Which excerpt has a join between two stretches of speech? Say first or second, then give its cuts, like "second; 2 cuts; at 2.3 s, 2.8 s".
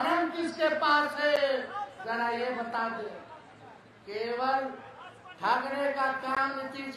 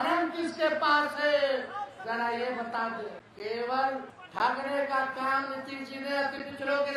second; 2 cuts; at 3.2 s, 4.2 s